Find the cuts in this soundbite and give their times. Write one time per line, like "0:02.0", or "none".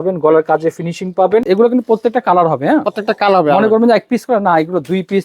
0:01.4